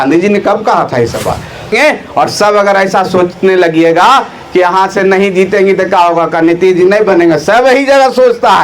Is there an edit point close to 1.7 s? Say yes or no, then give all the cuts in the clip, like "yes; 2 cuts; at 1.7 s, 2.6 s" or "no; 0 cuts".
yes; 1 cut; at 1.7 s